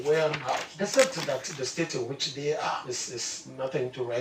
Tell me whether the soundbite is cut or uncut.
uncut